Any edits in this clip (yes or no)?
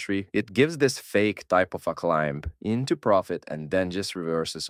no